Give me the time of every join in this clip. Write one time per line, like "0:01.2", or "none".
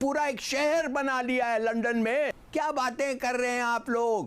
0:02.4

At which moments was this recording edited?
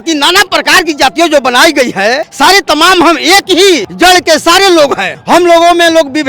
0:02.3
0:03.9
0:05.1

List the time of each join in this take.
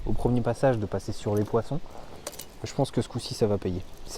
none

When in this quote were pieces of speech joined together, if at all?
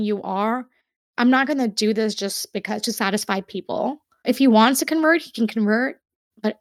0:04.2

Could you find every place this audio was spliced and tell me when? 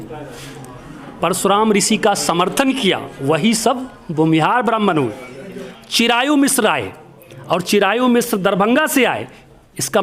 0:05.7

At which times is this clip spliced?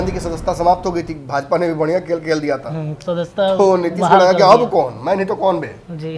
none

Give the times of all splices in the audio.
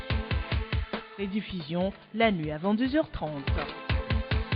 0:00.9

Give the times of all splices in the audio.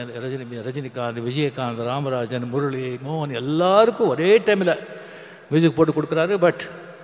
none

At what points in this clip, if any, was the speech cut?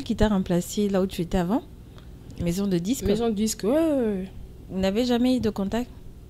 none

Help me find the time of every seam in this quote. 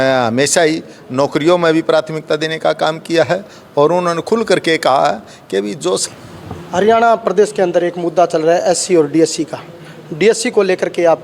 0:06.0

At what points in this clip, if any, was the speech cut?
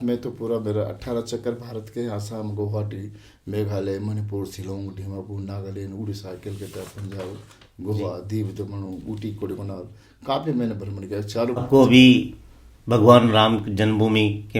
0:11.6

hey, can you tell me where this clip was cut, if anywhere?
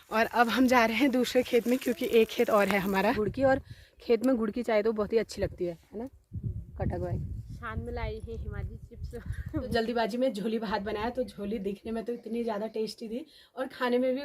0:03.2
0:09.7

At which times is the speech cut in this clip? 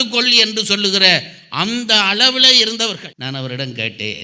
0:03.1

